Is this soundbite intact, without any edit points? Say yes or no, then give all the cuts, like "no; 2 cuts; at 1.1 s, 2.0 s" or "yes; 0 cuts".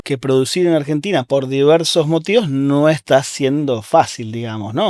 no; 2 cuts; at 1.2 s, 3.0 s